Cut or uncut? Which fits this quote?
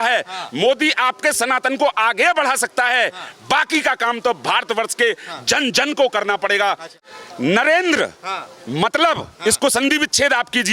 uncut